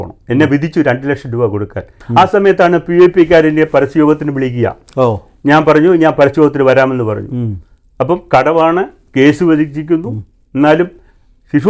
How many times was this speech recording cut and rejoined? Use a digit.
1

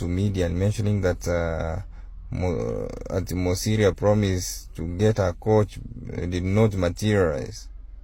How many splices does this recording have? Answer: 0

